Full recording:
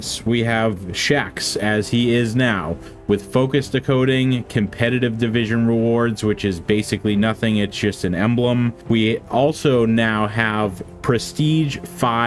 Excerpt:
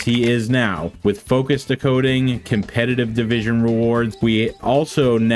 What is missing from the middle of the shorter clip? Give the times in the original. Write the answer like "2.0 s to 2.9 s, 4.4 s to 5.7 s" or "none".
2.7 s to 2.9 s, 6.2 s to 8.8 s